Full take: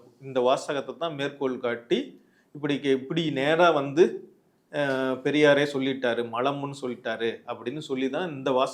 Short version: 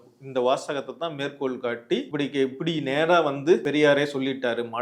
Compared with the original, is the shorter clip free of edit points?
no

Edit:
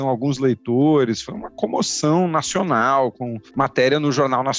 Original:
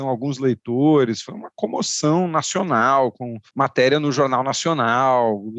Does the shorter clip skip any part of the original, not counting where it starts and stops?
no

